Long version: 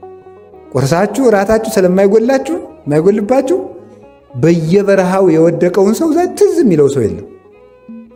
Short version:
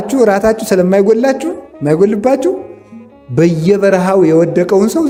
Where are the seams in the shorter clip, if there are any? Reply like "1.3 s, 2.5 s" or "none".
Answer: none